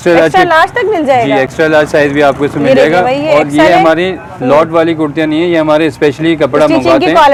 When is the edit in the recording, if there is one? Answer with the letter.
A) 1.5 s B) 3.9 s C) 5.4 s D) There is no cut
D